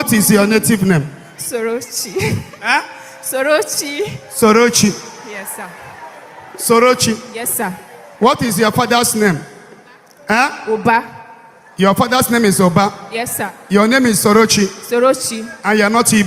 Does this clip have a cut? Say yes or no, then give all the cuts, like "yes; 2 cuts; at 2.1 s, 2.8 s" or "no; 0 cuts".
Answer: no; 0 cuts